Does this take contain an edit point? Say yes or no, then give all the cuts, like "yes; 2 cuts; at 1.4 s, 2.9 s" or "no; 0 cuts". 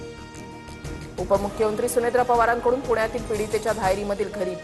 no; 0 cuts